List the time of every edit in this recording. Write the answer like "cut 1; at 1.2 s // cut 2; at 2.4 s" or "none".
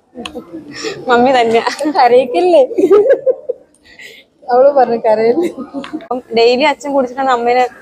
cut 1; at 6.1 s

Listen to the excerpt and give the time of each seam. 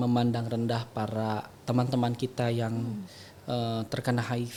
none

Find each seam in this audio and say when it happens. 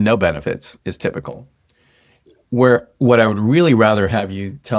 none

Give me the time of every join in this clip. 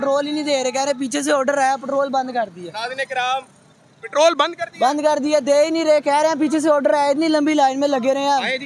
none

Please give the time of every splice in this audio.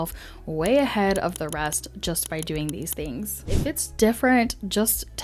cut 1; at 3.6 s

